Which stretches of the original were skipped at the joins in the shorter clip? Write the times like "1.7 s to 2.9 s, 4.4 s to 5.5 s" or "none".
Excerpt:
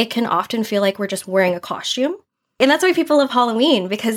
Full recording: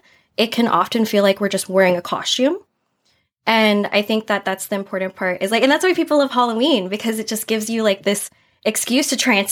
3.0 s to 5.6 s